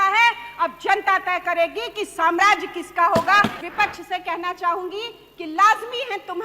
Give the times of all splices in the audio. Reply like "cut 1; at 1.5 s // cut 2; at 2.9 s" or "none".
cut 1; at 3.6 s